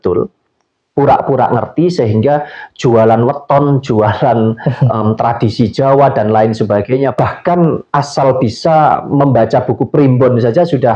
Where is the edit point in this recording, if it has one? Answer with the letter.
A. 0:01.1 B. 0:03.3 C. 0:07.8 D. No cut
C